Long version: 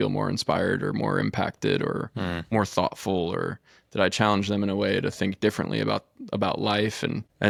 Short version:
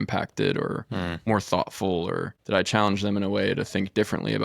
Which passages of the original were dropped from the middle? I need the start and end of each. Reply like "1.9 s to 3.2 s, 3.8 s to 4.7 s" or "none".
3.6 s to 3.8 s